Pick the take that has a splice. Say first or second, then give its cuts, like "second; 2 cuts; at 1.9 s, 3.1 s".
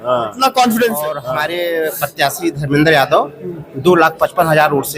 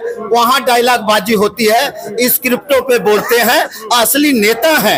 first; 1 cut; at 1.2 s